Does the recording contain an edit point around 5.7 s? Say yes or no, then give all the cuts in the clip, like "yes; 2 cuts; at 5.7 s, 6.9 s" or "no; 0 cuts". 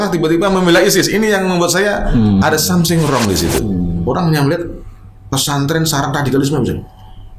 no; 1 cut; at 3.7 s